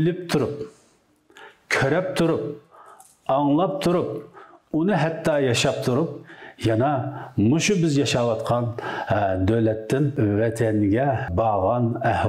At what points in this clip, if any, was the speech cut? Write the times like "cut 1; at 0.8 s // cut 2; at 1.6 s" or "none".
cut 1; at 10.1 s // cut 2; at 11.3 s